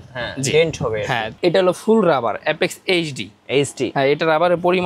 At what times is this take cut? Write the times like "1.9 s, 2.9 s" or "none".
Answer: 1.4 s, 3.9 s